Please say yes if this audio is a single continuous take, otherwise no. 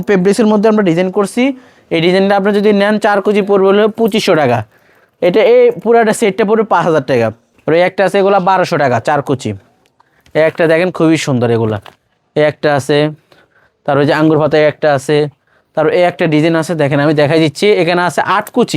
yes